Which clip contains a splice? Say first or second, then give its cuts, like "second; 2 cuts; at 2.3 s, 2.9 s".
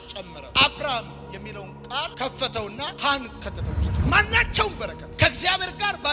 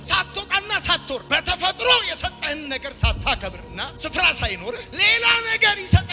first; 1 cut; at 3.9 s